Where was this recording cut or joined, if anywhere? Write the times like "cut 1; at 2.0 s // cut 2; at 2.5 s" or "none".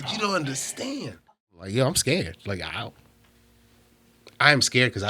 cut 1; at 1.7 s